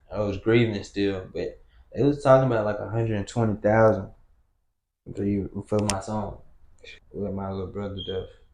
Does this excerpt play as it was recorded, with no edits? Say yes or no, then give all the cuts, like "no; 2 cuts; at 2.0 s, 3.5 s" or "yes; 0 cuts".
no; 1 cut; at 6.8 s